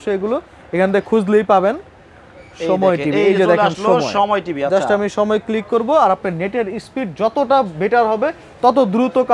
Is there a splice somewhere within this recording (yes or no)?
no